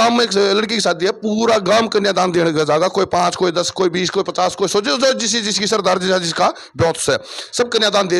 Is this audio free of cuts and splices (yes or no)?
yes